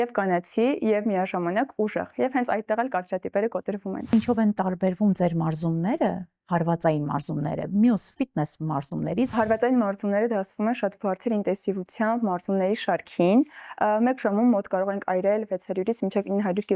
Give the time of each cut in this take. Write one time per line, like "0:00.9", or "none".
0:04.1
0:09.3